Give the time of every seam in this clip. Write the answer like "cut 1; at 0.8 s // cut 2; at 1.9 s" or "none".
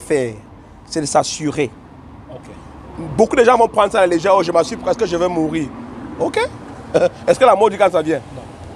none